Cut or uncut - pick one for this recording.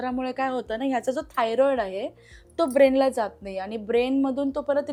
uncut